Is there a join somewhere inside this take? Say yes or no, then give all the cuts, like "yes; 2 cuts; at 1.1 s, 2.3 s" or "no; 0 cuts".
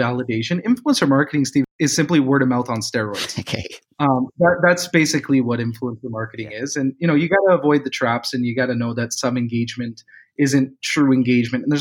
yes; 1 cut; at 1.7 s